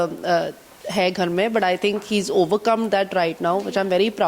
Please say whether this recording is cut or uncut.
uncut